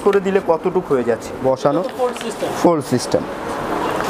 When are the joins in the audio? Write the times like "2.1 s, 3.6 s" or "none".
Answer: 1.4 s